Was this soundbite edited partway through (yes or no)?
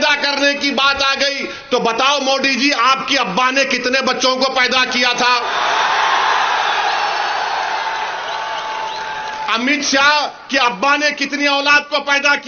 no